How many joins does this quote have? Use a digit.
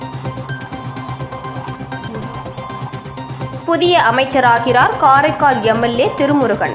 1